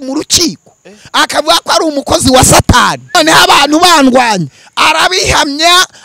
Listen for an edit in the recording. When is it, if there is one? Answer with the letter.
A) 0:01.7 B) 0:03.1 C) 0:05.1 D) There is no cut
B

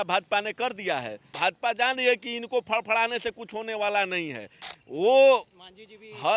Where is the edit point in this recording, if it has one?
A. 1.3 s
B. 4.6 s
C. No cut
A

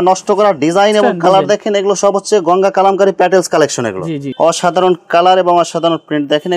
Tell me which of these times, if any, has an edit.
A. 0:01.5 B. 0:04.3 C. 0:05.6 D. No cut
B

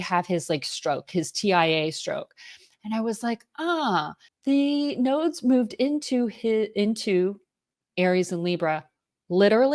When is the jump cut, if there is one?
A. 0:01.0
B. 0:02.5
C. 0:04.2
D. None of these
C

